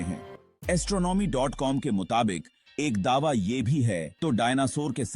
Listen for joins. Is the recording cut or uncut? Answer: cut